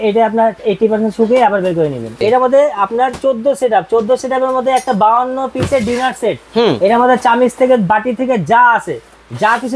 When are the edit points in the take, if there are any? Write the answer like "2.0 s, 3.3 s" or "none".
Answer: 2.2 s